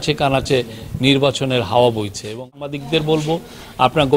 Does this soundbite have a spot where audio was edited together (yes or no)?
yes